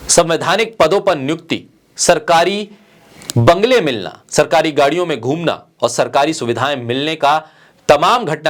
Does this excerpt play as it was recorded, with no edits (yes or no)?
yes